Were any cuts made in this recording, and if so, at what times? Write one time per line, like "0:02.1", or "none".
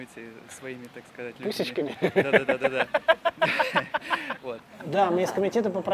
0:04.7